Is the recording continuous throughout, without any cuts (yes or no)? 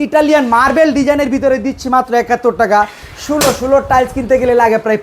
yes